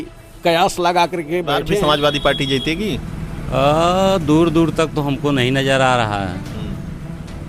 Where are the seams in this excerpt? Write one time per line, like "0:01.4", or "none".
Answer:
0:01.7